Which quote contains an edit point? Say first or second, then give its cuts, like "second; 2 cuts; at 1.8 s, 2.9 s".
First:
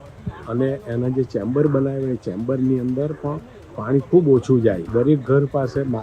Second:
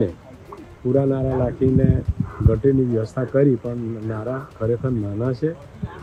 first; 1 cut; at 4.8 s